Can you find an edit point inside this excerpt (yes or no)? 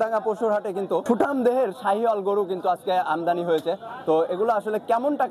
yes